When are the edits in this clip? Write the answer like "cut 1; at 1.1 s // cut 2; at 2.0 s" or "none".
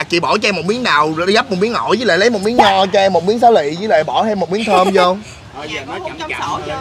none